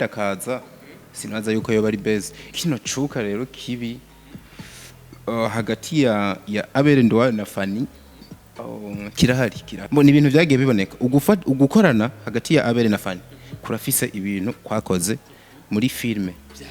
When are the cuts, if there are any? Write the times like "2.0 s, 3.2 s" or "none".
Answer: 2.4 s, 9.7 s